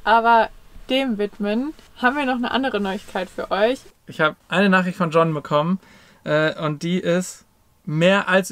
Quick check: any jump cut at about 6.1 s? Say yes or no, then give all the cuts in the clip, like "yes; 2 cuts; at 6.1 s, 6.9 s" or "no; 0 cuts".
no; 2 cuts; at 1.8 s, 4.0 s